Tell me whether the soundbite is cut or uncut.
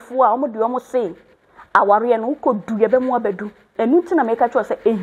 cut